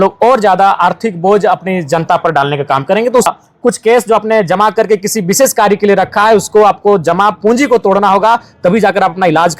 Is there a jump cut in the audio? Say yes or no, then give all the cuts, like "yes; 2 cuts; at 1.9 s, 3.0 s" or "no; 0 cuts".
yes; 1 cut; at 3.3 s